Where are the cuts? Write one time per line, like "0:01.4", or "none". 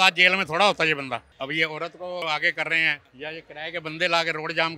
0:01.3
0:02.2
0:03.0